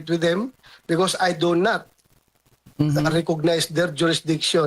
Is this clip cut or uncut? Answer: uncut